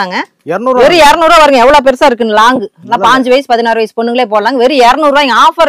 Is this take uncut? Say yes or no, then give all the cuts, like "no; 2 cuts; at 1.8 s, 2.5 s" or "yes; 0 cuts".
yes; 0 cuts